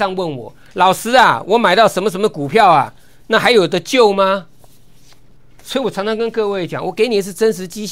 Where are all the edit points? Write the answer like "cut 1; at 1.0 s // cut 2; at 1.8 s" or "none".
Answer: none